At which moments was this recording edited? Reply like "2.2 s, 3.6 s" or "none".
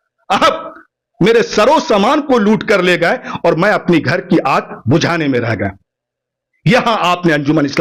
none